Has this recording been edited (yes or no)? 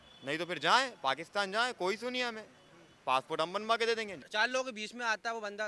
yes